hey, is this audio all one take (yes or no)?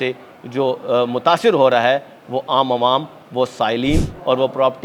yes